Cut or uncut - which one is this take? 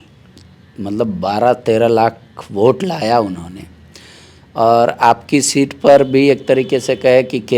uncut